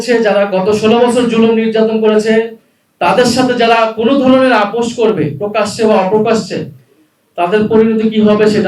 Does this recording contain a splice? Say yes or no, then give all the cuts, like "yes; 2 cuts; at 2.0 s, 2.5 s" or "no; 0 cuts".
no; 0 cuts